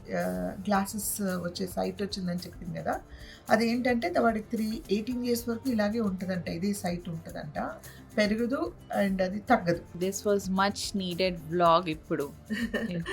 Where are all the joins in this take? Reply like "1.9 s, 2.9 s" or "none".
10.0 s